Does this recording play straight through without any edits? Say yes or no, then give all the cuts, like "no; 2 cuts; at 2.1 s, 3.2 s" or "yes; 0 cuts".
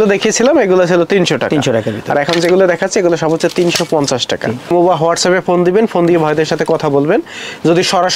yes; 0 cuts